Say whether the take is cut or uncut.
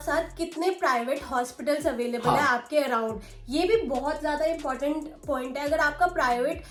uncut